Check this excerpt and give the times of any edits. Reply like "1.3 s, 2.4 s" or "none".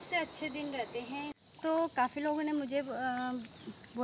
1.4 s